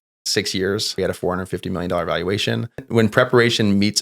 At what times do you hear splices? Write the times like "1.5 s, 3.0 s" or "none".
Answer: 0.9 s, 2.9 s

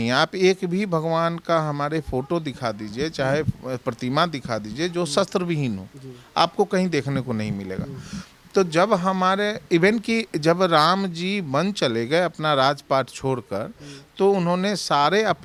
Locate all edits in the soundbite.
none

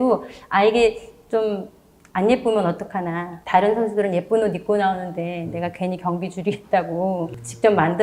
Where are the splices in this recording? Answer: none

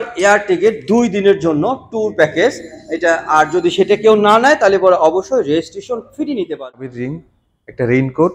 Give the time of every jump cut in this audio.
7.0 s

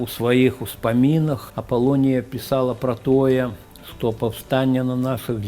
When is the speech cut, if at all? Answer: 1.5 s

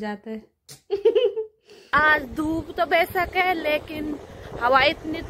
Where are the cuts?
1.9 s

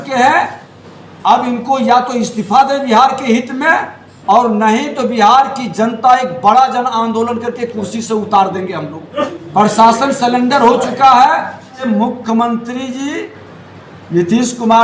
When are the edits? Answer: 9.4 s, 11.8 s

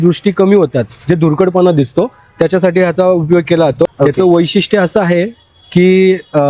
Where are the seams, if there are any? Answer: 3.9 s

